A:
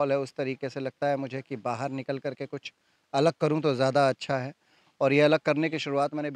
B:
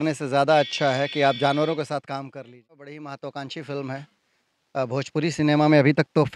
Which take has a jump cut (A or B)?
B